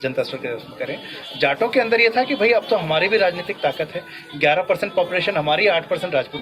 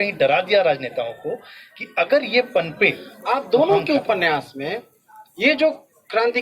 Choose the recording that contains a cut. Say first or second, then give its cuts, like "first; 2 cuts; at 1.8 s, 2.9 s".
second; 1 cut; at 3.1 s